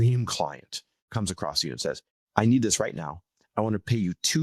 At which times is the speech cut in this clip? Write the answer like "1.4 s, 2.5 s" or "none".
1.1 s, 2.1 s